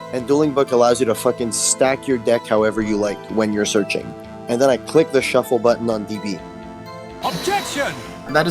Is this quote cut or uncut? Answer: uncut